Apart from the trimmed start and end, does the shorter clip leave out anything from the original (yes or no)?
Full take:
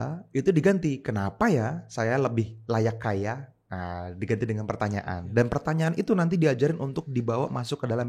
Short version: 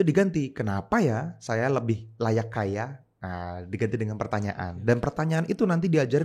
no